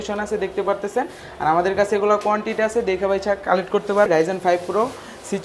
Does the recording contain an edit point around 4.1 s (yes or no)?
yes